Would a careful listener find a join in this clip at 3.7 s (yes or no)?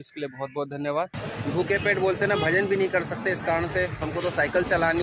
no